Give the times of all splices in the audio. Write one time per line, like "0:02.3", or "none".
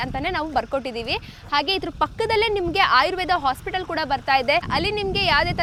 none